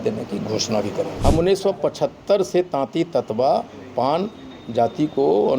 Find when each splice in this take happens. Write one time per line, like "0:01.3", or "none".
0:01.1